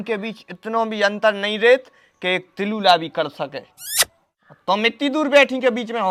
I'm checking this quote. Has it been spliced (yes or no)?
no